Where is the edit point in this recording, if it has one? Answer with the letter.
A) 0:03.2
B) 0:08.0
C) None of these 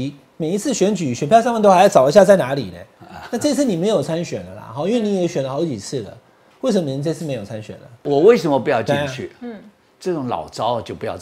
B